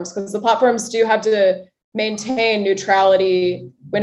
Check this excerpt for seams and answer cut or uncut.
uncut